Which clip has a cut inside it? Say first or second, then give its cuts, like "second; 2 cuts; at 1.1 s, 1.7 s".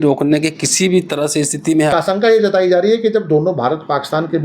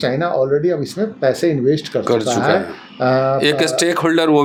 first; 1 cut; at 1.9 s